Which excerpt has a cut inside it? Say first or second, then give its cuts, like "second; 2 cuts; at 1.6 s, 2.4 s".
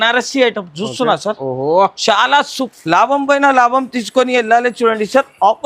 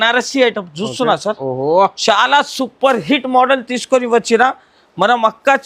first; 1 cut; at 2.6 s